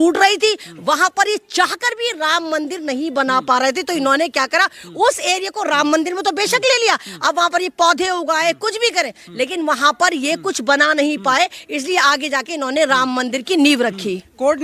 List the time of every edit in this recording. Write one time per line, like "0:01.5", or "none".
none